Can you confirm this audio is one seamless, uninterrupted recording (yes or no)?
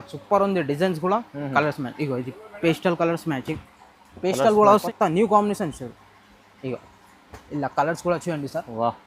no